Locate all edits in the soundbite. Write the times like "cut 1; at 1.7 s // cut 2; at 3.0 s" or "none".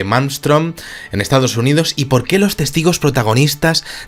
none